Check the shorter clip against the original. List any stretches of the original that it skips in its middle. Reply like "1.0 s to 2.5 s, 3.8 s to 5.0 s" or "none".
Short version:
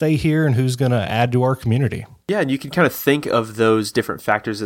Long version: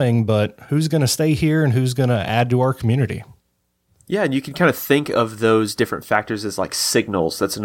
3.3 s to 3.9 s